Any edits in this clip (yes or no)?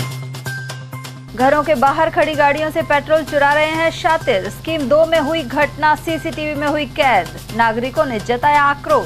yes